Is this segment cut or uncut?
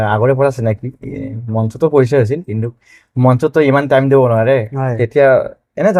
uncut